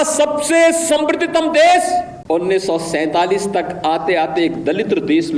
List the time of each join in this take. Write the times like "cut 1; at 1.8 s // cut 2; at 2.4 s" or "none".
cut 1; at 2.1 s